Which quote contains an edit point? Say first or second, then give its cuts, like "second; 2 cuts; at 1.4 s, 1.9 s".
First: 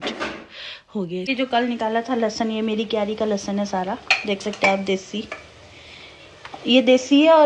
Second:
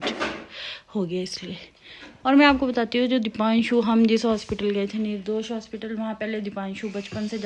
first; 1 cut; at 1.3 s